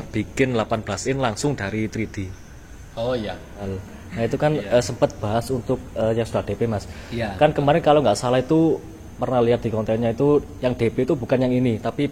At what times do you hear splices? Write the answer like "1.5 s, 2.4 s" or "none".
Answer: 3.6 s

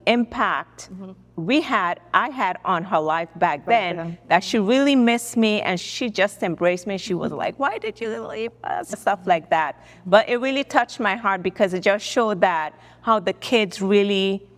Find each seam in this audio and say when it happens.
none

